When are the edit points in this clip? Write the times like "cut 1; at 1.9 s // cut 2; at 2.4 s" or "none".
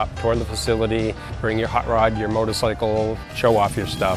cut 1; at 1.3 s // cut 2; at 3.3 s